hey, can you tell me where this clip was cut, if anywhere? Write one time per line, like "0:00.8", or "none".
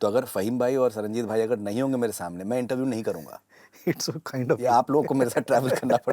none